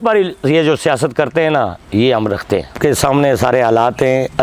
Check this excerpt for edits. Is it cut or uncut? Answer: cut